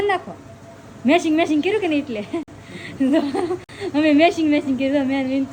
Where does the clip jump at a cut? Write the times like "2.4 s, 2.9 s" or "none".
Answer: none